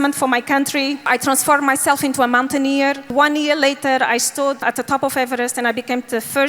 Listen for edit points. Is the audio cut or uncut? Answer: cut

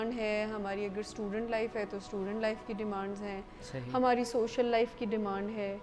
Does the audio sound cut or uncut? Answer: uncut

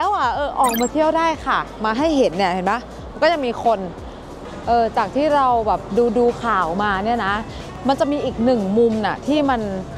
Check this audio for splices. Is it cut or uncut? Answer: cut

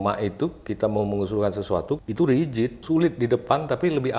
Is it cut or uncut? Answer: cut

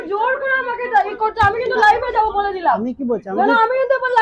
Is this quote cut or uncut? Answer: uncut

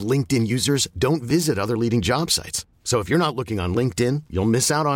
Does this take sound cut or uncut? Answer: uncut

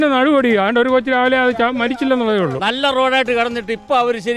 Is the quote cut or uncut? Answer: cut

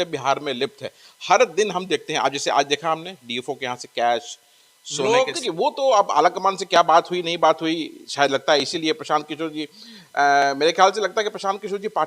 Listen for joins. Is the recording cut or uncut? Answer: cut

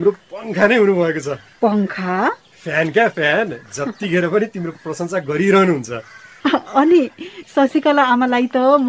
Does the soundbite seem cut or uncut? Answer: uncut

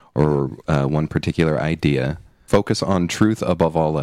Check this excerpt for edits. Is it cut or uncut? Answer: cut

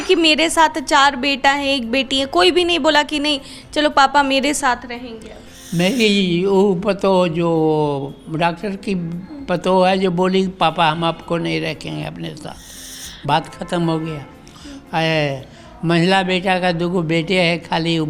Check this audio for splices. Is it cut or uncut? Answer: uncut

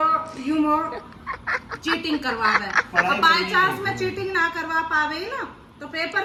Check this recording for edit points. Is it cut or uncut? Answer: uncut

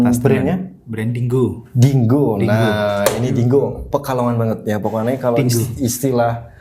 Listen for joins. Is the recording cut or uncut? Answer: uncut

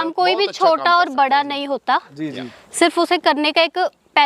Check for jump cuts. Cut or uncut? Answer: uncut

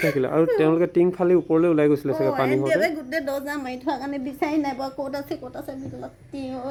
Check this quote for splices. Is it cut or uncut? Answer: uncut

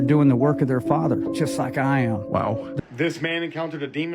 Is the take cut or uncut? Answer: cut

